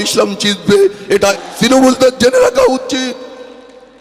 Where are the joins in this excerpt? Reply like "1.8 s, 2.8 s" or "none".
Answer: 1.4 s